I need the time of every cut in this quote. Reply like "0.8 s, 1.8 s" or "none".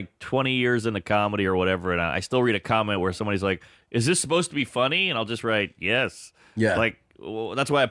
none